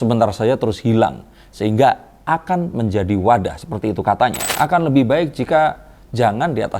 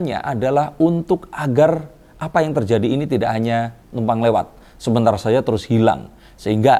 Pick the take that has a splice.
first; 1 cut; at 4.4 s

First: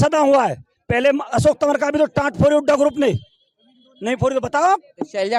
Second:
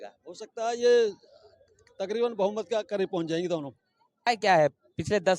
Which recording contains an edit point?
second; 1 cut; at 4.3 s

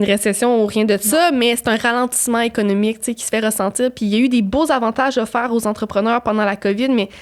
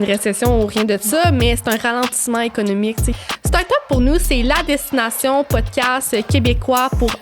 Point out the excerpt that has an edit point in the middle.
second; 1 cut; at 3.2 s

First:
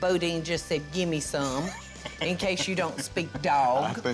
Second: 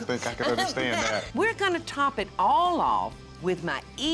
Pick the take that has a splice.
second; 2 cuts; at 1.4 s, 3.2 s

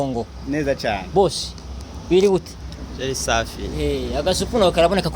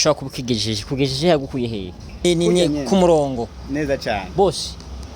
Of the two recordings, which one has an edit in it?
second; 1 cut; at 2.2 s

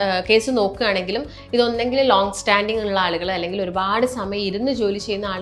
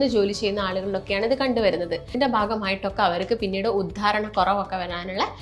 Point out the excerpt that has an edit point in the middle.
second; 1 cut; at 2.0 s

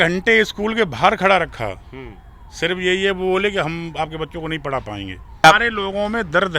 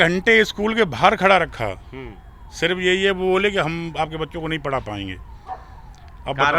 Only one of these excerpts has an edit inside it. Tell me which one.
first; 1 cut; at 5.4 s

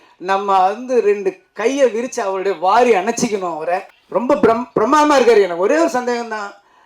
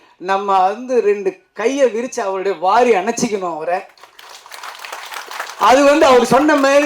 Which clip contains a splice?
first; 1 cut; at 4.0 s

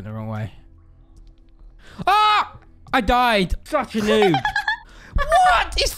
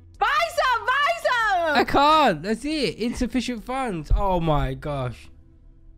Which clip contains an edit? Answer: first; 1 cut; at 3.6 s

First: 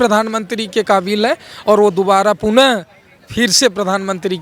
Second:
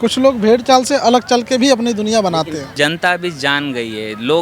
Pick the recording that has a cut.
second; 1 cut; at 2.7 s

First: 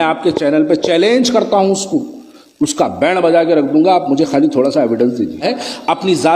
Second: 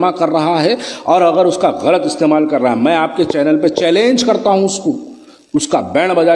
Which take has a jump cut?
first; 1 cut; at 5.4 s

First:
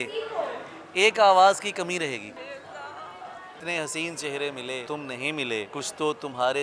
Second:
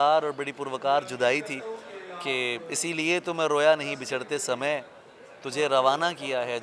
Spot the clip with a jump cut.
first; 4 cuts; at 2.4 s, 3.6 s, 4.8 s, 5.7 s

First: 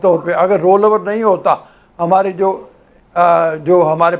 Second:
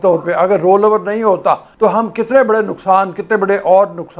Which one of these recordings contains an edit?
second; 1 cut; at 1.7 s

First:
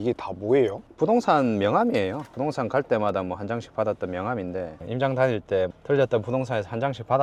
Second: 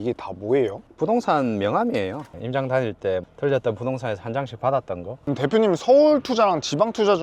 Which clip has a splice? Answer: second; 2 cuts; at 2.3 s, 5.1 s

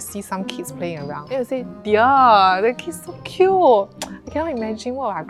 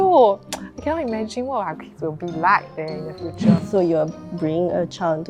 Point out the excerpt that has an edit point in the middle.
second; 1 cut; at 3.5 s

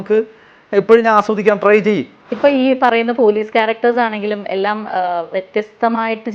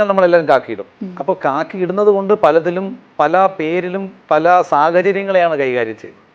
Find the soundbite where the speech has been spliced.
first; 1 cut; at 2.2 s

